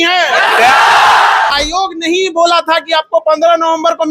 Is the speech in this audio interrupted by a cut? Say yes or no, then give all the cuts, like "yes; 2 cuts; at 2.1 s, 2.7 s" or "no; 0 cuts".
yes; 1 cut; at 1.5 s